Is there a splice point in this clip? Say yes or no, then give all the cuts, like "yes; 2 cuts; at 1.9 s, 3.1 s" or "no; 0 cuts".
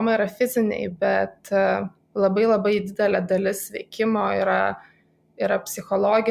no; 0 cuts